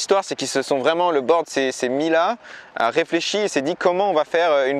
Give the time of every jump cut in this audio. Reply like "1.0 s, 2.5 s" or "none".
none